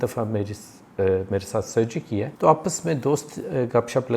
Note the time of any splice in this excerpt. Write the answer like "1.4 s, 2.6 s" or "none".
2.3 s